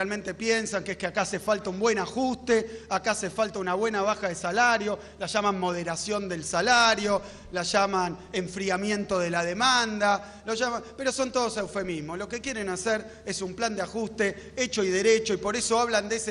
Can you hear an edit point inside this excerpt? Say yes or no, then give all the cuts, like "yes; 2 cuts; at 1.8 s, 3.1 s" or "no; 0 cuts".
no; 0 cuts